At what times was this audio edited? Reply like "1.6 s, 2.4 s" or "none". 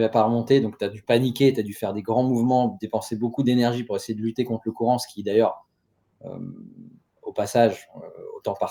none